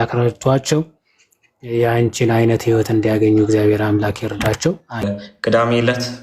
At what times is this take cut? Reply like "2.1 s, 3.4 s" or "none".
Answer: 5.1 s